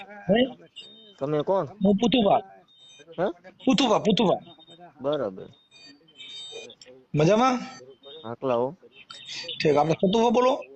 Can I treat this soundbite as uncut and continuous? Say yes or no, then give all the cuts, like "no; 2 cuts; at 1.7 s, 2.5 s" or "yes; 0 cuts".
yes; 0 cuts